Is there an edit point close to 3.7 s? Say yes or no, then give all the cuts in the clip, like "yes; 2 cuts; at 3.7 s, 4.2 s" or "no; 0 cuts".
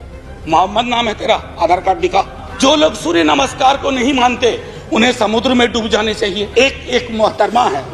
no; 2 cuts; at 2.4 s, 6.4 s